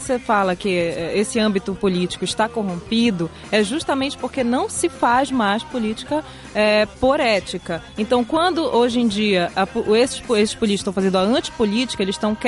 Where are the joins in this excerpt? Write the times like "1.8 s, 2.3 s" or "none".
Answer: none